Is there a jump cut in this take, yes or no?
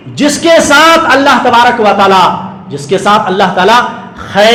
no